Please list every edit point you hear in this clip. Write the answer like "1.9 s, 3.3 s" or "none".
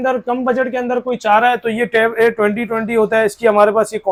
none